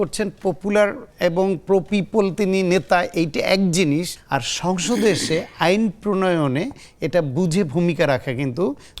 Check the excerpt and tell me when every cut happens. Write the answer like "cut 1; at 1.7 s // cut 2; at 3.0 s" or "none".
cut 1; at 1.0 s // cut 2; at 4.2 s